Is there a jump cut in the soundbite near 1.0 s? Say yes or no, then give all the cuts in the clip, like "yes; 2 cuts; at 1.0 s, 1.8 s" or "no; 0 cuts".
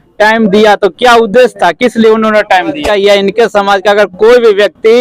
no; 1 cut; at 2.8 s